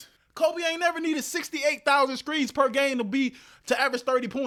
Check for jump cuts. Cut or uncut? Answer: uncut